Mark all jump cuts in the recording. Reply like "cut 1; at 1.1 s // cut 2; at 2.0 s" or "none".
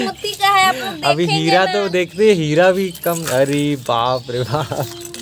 none